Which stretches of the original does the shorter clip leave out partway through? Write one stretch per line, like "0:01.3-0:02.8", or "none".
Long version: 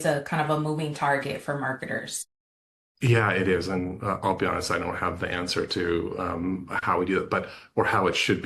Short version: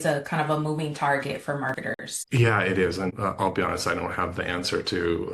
0:01.8-0:02.5
0:03.8-0:04.0